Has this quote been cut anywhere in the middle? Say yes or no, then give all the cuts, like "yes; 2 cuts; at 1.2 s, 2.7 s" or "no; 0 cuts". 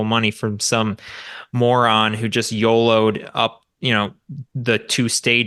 no; 0 cuts